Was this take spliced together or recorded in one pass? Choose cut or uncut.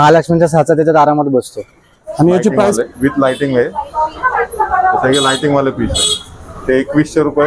cut